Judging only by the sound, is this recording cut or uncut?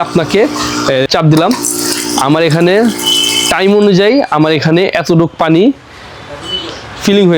cut